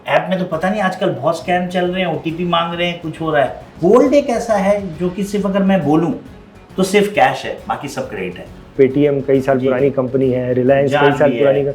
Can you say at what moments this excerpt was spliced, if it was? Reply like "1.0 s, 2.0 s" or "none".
3.7 s, 8.7 s